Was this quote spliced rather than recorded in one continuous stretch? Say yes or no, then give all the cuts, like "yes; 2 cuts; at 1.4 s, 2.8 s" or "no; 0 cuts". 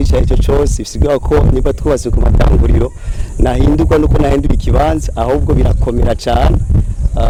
no; 0 cuts